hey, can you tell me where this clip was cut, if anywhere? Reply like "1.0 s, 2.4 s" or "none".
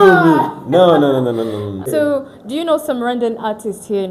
1.9 s